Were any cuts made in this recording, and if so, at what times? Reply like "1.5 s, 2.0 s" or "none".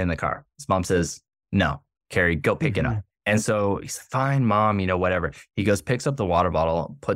2.4 s